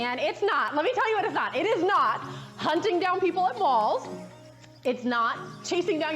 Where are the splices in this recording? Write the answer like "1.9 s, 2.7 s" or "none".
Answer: 1.8 s

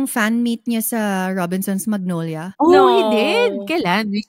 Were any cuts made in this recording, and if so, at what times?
2.4 s

